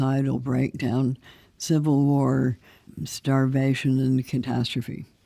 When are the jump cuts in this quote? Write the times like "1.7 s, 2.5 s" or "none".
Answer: 2.9 s